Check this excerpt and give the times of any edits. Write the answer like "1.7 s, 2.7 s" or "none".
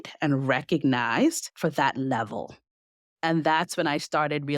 1.5 s